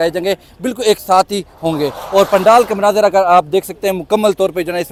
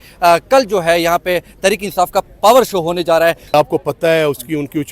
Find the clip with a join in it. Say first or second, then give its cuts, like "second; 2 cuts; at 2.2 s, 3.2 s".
second; 1 cut; at 3.5 s